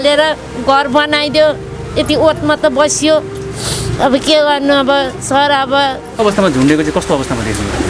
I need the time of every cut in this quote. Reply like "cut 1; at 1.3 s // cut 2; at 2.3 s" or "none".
cut 1; at 6.2 s